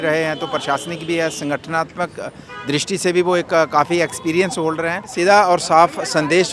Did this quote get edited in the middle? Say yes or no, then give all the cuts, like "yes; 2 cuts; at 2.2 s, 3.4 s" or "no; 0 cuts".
yes; 1 cut; at 5.1 s